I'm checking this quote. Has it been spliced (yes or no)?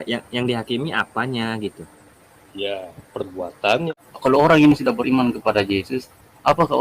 yes